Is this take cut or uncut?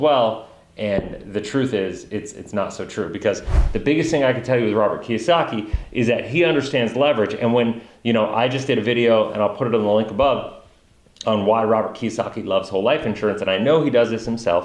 cut